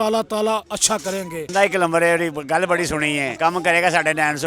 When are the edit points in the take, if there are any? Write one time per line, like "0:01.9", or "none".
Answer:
0:01.5
0:03.3